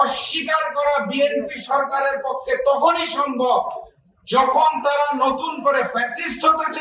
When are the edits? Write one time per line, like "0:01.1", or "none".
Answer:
none